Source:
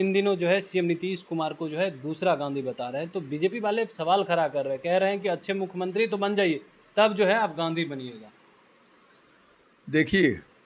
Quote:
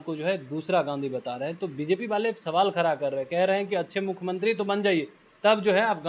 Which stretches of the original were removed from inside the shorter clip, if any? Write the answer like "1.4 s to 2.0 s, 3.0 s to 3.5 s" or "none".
none